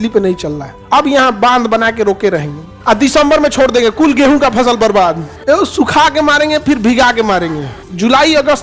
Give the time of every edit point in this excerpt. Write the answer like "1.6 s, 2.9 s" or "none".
0.8 s, 2.8 s, 7.7 s